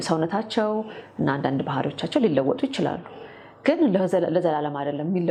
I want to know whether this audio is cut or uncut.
uncut